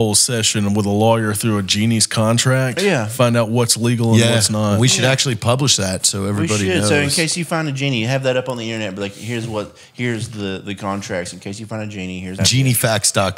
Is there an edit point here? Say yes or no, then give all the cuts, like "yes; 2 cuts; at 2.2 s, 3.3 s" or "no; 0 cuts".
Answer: yes; 1 cut; at 12.4 s